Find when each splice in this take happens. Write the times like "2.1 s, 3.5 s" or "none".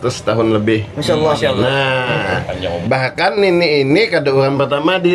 2.8 s